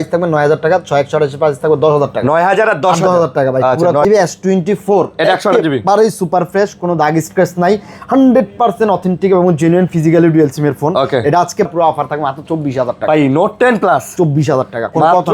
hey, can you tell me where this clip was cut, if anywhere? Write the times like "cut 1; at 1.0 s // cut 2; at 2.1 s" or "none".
cut 1; at 4.0 s // cut 2; at 11.7 s

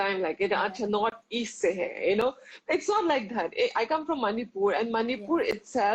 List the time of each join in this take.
none

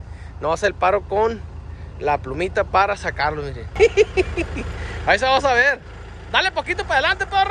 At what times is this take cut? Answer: cut 1; at 3.8 s

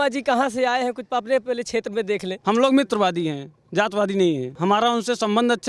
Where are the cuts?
cut 1; at 2.4 s

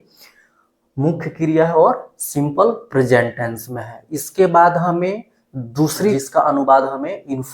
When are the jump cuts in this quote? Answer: cut 1; at 6.2 s

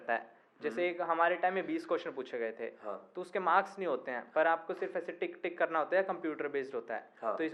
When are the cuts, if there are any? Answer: none

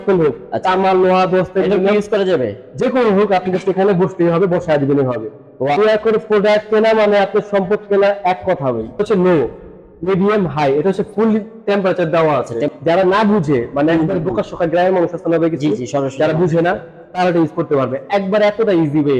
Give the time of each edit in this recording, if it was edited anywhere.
cut 1; at 5.8 s // cut 2; at 9.0 s // cut 3; at 12.7 s

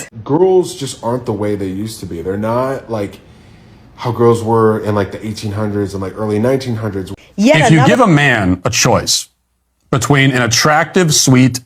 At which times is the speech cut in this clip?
cut 1; at 7.6 s

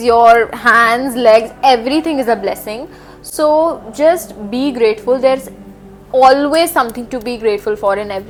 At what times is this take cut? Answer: none

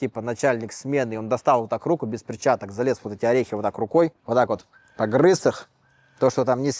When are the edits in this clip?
cut 1; at 4.2 s

